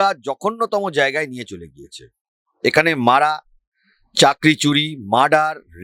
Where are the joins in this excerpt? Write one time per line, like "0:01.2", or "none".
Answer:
none